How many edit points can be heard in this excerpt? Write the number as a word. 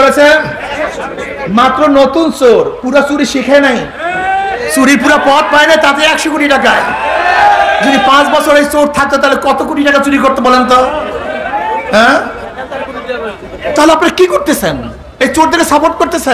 zero